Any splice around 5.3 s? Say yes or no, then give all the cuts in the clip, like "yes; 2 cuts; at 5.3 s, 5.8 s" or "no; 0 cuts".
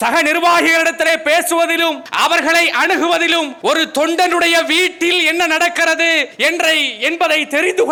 no; 0 cuts